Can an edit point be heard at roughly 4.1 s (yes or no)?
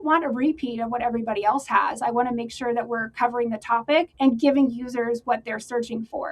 yes